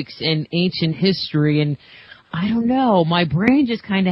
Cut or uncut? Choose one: cut